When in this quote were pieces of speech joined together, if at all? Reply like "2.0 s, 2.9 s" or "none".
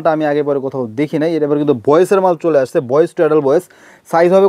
none